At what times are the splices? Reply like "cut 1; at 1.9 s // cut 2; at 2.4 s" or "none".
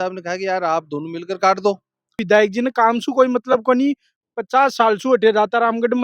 cut 1; at 2.2 s